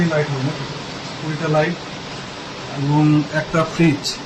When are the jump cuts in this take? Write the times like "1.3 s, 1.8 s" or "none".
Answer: none

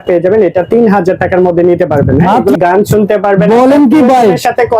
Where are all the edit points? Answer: 2.6 s

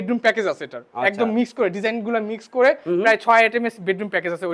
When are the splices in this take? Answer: none

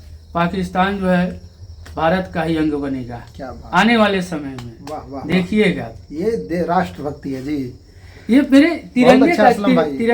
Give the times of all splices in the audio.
none

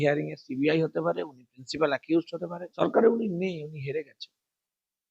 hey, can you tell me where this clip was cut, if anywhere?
2.8 s

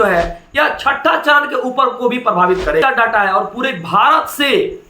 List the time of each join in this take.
2.8 s

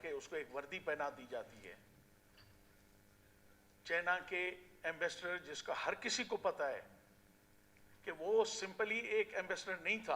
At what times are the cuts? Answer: none

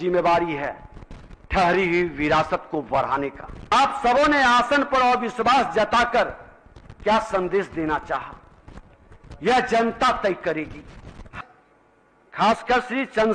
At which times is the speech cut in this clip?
3.5 s, 11.3 s

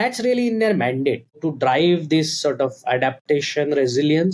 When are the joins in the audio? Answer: 1.4 s

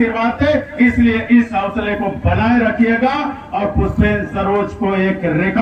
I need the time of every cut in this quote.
none

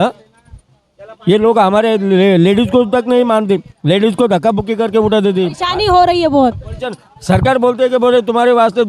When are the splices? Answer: 5.6 s

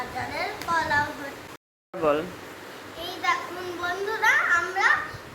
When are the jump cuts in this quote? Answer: 1.4 s

